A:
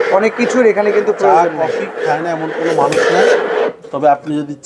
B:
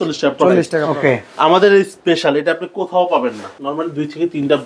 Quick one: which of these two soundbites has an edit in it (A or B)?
B